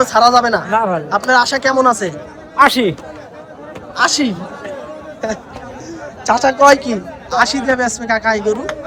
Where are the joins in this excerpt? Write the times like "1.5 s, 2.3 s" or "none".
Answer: none